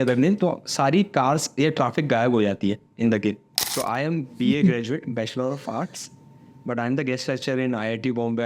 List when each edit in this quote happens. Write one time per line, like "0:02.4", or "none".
0:03.5

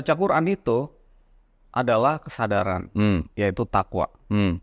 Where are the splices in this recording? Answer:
none

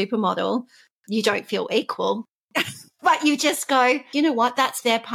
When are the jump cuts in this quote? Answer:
0:04.1

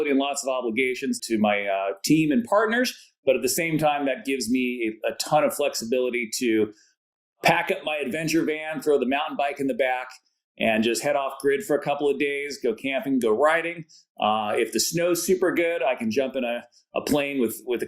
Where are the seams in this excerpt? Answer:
0:01.2

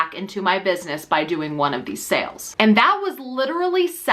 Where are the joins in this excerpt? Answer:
0:02.4

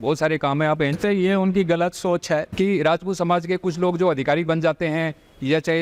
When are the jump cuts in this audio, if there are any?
0:01.0
0:02.5

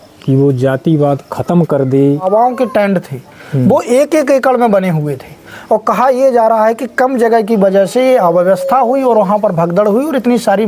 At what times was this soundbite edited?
0:02.2

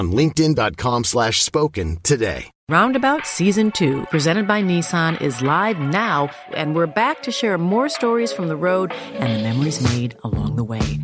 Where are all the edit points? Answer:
0:02.5

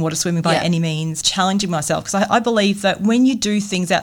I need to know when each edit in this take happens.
0:01.2

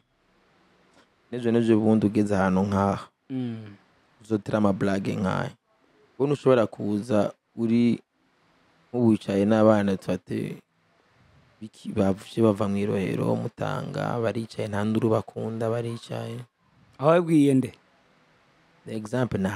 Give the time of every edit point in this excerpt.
none

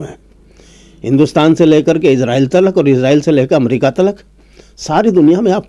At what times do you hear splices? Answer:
none

